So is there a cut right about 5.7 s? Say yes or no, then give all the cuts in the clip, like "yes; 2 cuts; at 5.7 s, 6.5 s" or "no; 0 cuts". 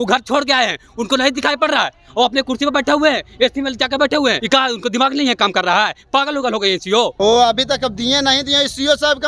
no; 2 cuts; at 4.4 s, 7.1 s